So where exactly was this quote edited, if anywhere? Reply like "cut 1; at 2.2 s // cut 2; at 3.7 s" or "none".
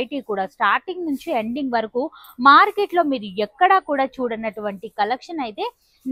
none